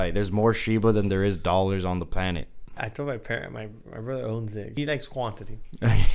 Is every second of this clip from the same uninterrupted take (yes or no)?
no